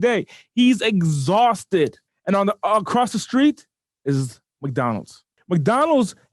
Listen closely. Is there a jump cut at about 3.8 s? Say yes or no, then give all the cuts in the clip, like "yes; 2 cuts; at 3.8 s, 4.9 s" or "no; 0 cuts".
no; 2 cuts; at 2.1 s, 5.3 s